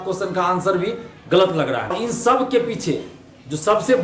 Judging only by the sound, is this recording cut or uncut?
cut